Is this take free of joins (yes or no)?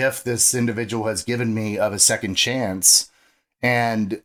yes